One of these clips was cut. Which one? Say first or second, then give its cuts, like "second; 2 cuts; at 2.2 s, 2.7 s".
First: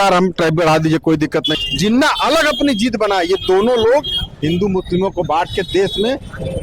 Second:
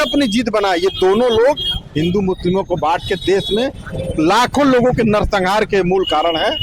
first; 1 cut; at 1.5 s